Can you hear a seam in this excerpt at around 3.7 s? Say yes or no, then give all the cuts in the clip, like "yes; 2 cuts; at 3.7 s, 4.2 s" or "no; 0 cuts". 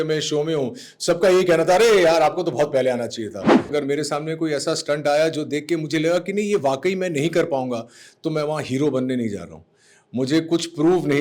yes; 1 cut; at 3.7 s